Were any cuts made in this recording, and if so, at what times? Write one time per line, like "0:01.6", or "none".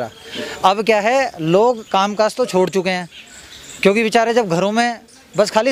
none